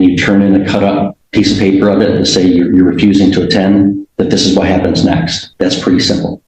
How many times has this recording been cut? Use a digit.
2